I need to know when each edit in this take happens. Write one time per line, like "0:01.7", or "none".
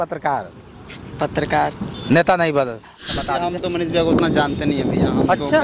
0:02.9